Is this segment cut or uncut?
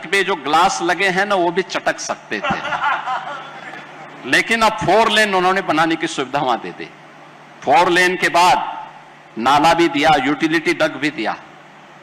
uncut